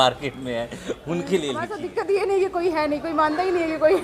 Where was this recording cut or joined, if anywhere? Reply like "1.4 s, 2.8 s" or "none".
1.8 s